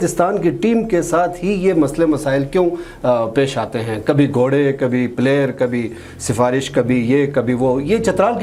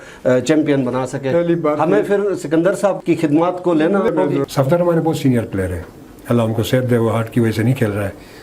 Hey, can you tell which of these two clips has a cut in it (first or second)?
second